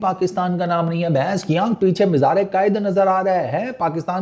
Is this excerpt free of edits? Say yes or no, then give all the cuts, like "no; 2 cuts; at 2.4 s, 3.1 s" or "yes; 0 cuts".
yes; 0 cuts